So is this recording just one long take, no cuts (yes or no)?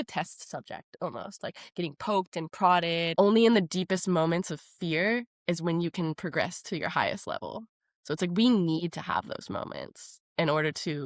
no